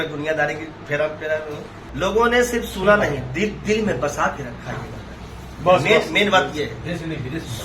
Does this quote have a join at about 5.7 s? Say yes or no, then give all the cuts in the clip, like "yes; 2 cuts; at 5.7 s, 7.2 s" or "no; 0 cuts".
no; 1 cut; at 1.8 s